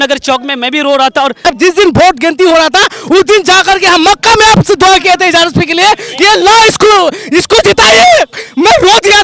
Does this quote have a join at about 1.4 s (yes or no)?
yes